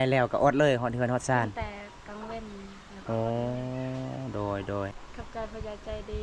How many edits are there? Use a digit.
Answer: 1